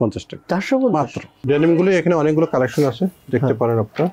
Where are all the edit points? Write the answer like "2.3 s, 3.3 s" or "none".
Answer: 1.3 s